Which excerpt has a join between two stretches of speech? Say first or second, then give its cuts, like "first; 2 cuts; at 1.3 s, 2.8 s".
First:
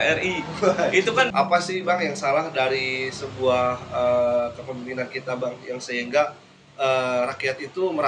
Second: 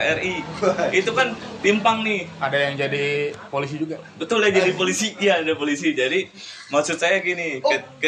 first; 1 cut; at 1.3 s